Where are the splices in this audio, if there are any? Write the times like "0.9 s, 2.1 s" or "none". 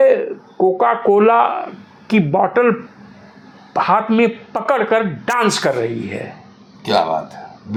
none